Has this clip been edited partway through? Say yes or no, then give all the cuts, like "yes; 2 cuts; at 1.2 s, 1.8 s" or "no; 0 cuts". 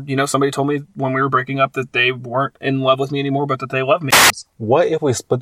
yes; 1 cut; at 4.2 s